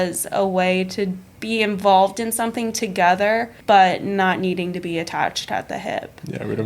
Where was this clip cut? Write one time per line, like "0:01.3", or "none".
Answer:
0:01.3
0:03.5